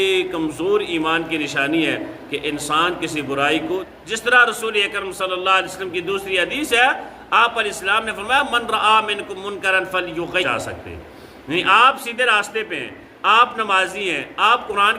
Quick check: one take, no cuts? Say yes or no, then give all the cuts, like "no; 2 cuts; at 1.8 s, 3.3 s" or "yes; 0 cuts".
no; 2 cuts; at 3.9 s, 10.5 s